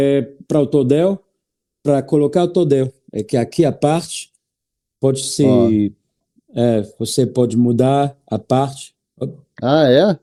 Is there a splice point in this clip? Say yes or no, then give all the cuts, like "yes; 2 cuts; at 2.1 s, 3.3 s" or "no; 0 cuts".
no; 0 cuts